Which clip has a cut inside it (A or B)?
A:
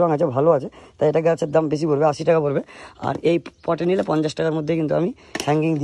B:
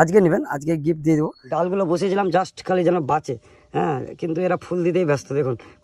B